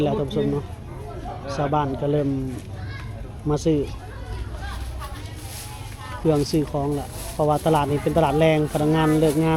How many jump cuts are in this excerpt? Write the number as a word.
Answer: zero